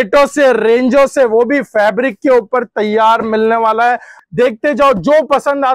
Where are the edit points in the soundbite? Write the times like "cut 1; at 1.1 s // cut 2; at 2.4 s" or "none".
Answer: cut 1; at 4.1 s